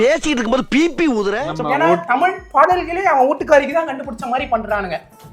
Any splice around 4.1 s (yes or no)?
no